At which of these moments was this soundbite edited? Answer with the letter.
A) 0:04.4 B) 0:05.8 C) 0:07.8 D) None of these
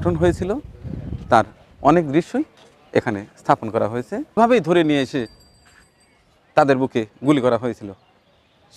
A